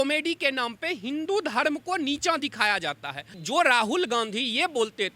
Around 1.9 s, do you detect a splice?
no; 1 cut; at 3.4 s

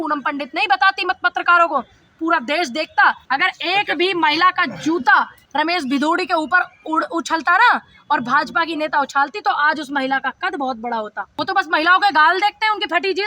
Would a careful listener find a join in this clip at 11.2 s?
yes; 3 cuts; at 3.2 s, 5.4 s, 11.2 s

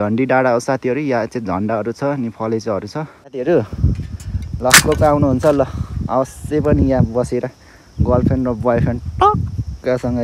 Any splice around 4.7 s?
no; 1 cut; at 3.3 s

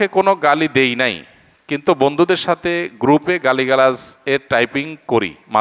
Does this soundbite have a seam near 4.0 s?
no; 0 cuts

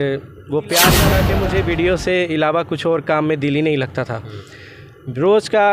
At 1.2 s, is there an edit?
yes; 1 cut; at 1.2 s

